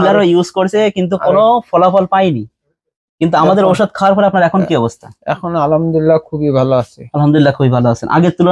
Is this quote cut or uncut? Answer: uncut